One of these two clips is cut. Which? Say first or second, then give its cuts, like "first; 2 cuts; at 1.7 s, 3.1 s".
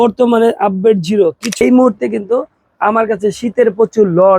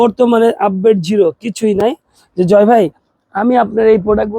first; 1 cut; at 1.6 s